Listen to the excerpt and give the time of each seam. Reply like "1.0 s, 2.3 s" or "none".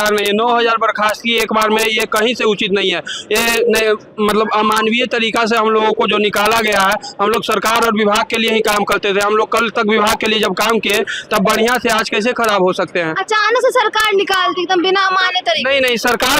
none